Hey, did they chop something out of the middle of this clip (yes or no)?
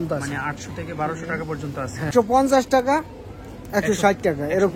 yes